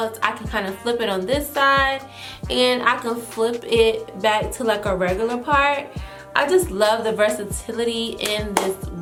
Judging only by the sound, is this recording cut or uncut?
uncut